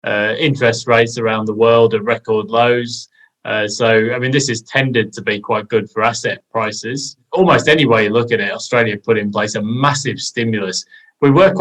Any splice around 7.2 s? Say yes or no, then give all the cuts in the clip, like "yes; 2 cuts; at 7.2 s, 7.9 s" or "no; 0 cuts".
yes; 1 cut; at 7.2 s